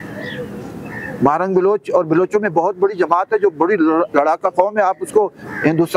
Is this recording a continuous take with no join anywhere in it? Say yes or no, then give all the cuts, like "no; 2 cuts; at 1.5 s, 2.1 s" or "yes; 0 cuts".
yes; 0 cuts